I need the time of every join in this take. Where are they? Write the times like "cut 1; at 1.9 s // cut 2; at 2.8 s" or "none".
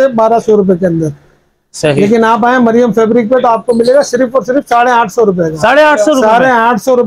none